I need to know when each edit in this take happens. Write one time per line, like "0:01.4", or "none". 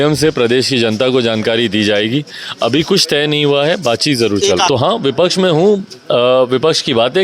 0:04.7